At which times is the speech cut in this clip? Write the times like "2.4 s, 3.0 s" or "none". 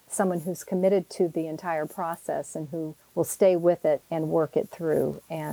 3.0 s, 4.1 s

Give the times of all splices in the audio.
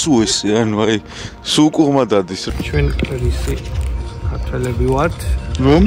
2.4 s

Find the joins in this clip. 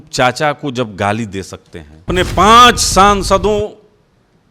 2.1 s

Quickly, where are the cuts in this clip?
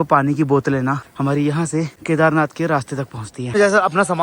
1.1 s, 2.0 s, 3.5 s

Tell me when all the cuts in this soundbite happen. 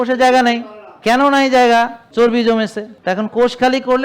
1.0 s, 2.0 s, 2.9 s

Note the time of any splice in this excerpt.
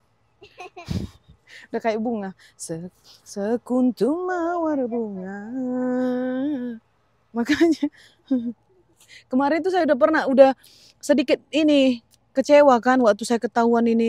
none

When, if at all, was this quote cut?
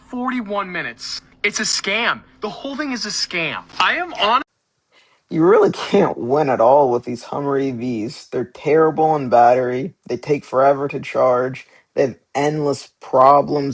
none

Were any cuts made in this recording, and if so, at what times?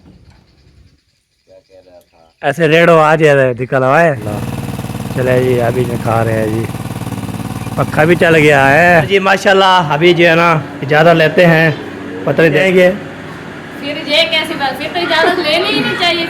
4.3 s, 9.1 s, 12.6 s

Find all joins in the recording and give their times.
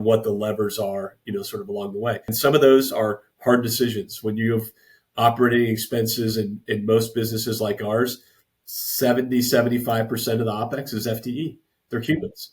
2.3 s

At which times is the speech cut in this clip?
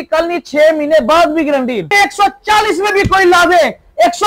1.9 s

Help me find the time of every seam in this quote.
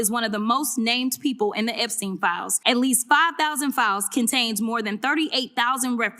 2.5 s

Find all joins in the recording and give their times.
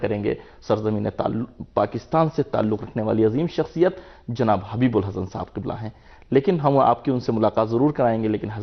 none

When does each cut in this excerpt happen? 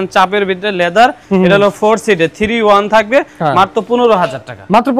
none

